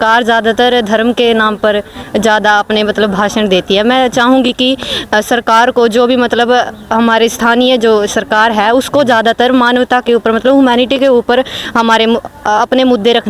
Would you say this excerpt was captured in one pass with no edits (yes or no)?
yes